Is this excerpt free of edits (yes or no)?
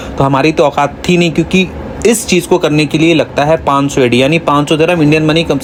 yes